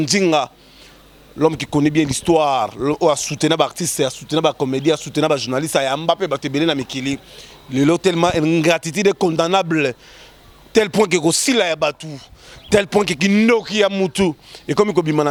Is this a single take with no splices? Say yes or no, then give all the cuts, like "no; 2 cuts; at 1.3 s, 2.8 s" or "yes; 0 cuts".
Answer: yes; 0 cuts